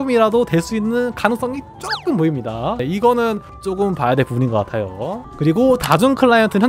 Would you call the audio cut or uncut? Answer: cut